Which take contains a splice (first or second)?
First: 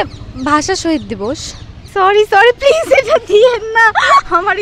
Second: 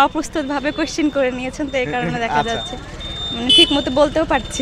first